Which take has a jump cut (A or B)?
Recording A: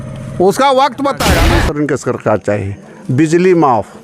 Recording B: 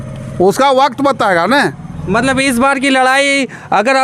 A